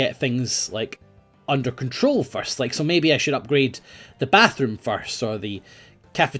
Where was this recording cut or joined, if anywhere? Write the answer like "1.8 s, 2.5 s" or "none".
2.8 s

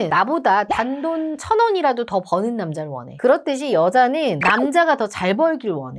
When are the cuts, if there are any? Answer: 3.1 s

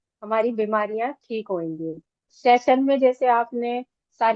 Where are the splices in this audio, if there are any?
2.3 s

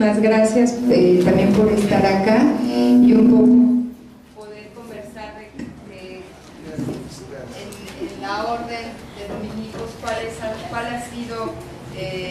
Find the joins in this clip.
2.9 s

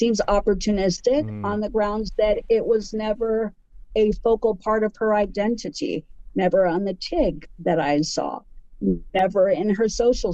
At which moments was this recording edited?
none

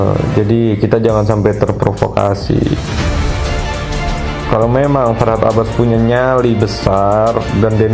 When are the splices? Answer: none

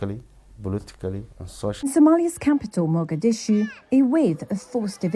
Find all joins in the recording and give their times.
1.8 s

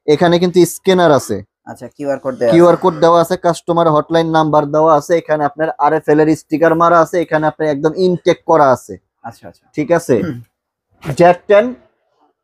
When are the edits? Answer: 11.0 s

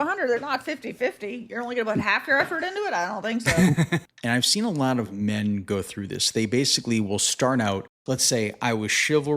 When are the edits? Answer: 4.0 s, 7.9 s

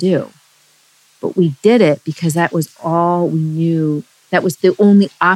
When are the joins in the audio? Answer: none

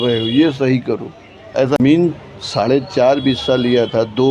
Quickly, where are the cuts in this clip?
1.8 s

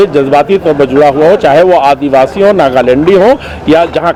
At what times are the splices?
none

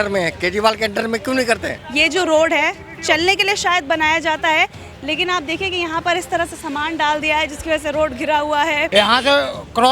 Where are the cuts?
1.8 s, 8.9 s

